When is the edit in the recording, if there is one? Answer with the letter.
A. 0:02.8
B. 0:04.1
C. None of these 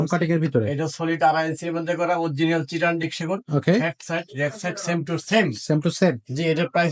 C